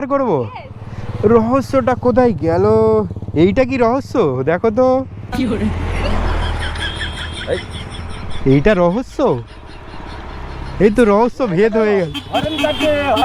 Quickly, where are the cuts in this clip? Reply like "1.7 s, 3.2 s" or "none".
none